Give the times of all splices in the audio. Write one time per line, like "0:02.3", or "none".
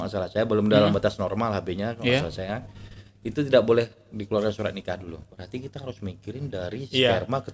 0:05.2